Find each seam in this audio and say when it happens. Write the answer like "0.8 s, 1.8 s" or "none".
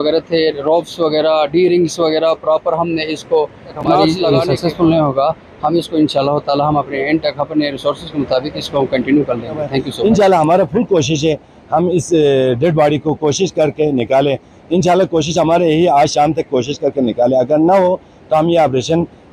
4.2 s, 9.9 s